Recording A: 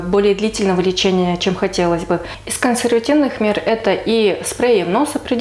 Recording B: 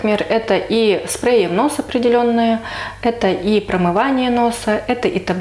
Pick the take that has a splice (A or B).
A